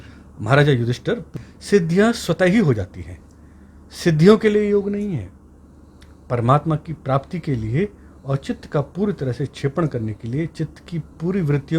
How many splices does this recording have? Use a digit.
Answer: 1